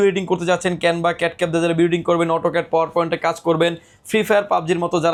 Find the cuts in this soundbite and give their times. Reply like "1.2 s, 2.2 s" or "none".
none